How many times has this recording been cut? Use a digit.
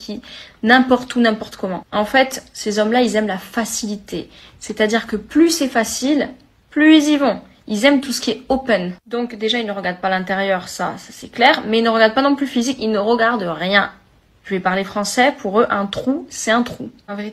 2